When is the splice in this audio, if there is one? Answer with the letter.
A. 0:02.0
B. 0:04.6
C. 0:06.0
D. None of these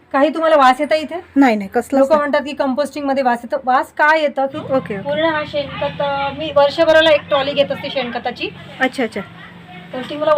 B